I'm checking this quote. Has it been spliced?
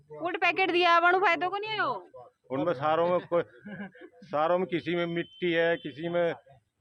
no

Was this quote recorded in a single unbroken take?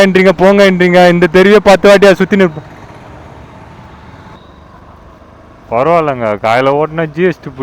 no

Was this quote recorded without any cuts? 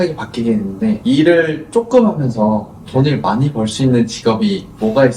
no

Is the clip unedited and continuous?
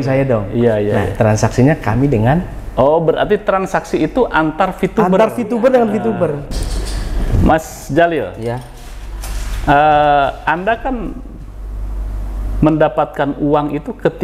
no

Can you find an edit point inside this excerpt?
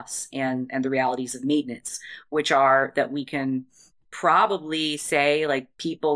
no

